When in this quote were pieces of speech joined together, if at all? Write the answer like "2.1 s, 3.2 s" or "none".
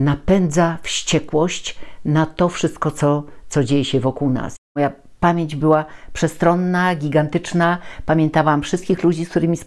4.6 s